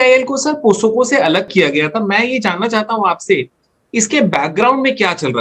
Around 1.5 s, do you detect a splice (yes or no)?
yes